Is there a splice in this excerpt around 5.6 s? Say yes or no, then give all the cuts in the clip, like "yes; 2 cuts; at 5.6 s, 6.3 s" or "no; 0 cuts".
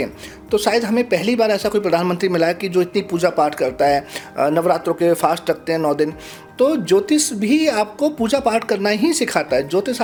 no; 0 cuts